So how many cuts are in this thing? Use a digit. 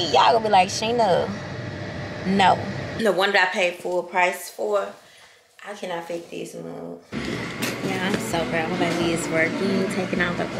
2